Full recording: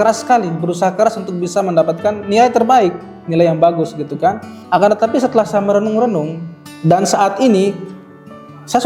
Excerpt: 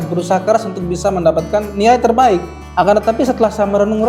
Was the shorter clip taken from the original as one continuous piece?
no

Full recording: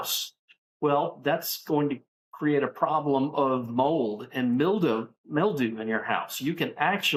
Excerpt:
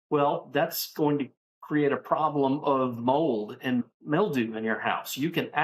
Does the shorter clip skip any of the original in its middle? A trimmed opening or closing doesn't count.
yes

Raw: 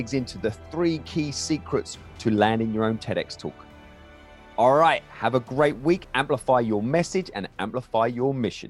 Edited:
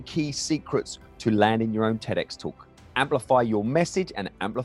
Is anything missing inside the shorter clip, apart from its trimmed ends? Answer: yes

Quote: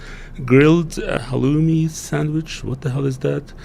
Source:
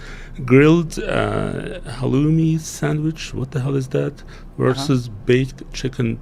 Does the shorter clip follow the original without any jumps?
no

